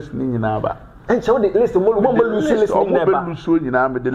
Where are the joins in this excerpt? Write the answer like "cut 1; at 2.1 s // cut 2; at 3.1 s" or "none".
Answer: none